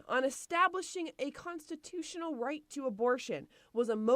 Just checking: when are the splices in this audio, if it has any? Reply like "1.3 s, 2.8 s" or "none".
none

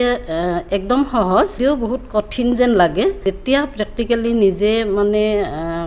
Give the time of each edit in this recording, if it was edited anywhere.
1.6 s, 3.2 s

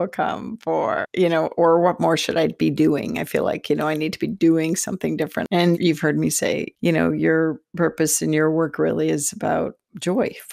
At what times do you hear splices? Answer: 5.4 s

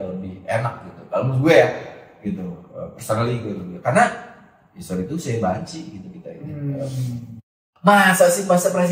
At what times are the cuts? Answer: 7.7 s

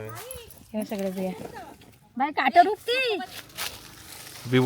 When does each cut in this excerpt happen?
3.3 s

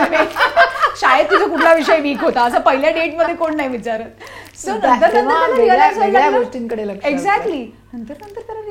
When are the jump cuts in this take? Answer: none

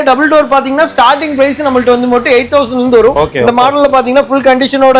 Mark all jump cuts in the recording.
3.2 s

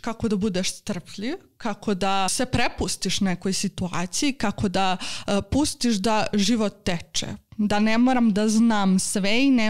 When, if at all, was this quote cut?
2.3 s

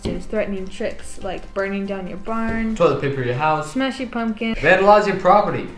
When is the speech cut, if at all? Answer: 4.5 s

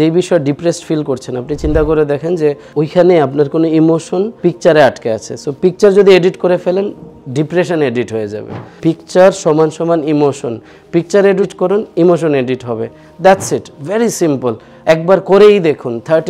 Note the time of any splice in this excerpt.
2.6 s, 4.3 s, 8.7 s, 11.5 s, 14.7 s

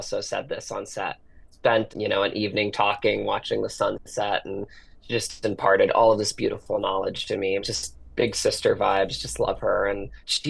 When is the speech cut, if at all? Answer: none

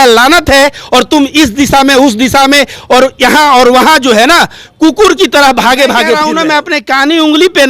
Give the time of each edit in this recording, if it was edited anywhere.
6.2 s

